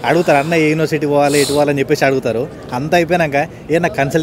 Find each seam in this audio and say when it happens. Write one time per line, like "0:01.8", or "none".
none